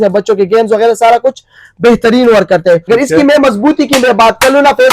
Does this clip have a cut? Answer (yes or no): yes